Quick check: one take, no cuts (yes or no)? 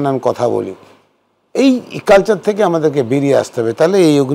yes